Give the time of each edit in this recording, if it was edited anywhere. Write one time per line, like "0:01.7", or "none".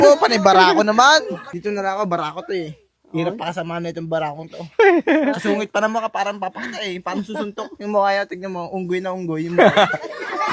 0:01.5